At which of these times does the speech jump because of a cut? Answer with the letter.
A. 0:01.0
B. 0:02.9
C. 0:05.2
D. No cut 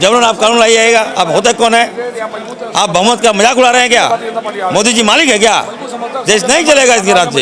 D